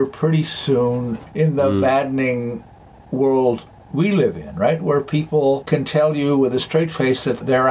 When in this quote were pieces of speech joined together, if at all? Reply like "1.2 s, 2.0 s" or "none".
1.2 s, 5.6 s

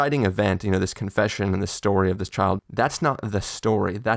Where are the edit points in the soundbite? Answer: 2.6 s

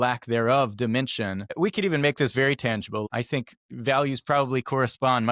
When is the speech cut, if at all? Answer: 1.4 s, 3.1 s

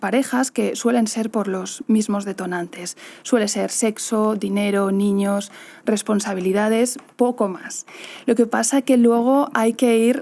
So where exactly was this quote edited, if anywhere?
none

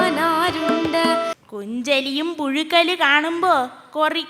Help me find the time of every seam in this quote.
1.3 s

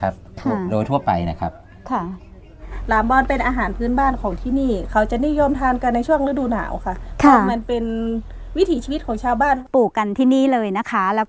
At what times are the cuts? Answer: 2.7 s, 9.6 s

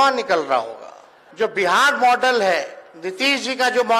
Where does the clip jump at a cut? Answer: 1.2 s

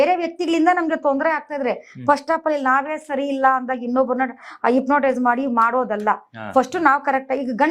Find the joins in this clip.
none

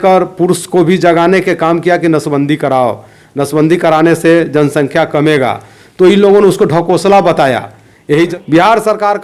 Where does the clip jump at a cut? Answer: 8.3 s

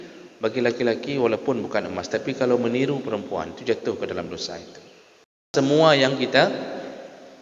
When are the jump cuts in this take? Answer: 5.5 s

